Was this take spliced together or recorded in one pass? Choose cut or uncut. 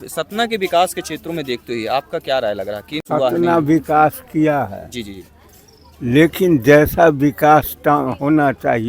cut